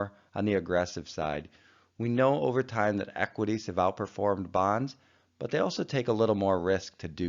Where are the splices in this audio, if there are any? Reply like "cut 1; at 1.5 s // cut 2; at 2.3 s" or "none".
none